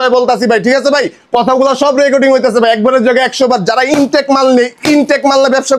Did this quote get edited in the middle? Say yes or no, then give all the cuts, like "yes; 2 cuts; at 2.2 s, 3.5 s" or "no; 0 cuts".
no; 0 cuts